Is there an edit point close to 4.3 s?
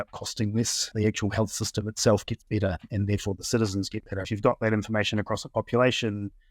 yes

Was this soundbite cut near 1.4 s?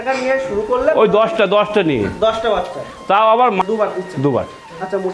no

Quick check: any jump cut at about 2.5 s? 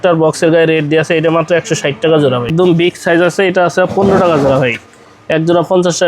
yes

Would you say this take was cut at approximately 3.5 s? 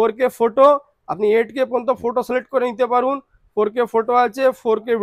no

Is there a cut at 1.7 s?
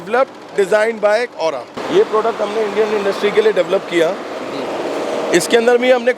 yes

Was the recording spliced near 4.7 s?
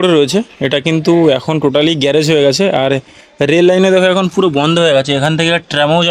no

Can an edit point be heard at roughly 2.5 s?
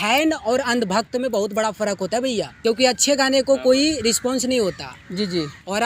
yes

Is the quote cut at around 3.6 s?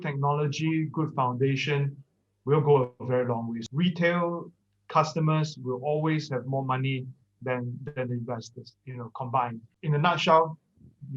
yes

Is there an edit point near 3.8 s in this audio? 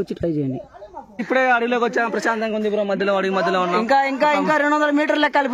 no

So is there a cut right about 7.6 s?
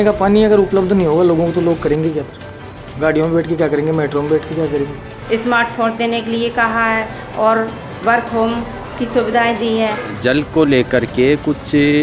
no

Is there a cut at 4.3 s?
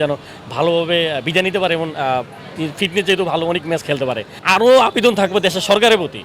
yes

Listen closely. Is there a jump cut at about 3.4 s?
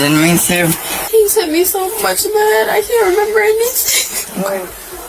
no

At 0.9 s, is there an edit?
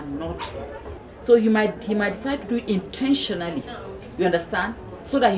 yes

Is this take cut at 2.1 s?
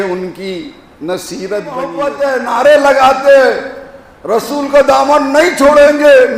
yes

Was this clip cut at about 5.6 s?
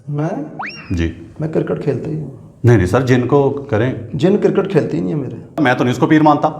yes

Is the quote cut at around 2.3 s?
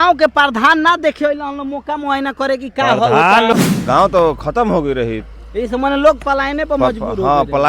no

